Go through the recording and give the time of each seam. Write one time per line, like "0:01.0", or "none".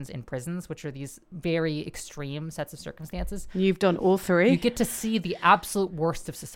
0:01.2